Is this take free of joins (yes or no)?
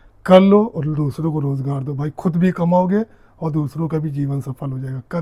yes